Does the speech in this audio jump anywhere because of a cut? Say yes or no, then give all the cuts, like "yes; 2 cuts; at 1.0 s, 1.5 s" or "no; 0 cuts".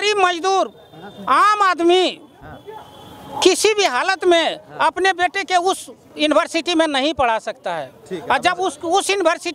no; 0 cuts